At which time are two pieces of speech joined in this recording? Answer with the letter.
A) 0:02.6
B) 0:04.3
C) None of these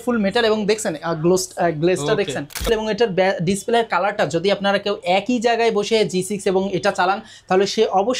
A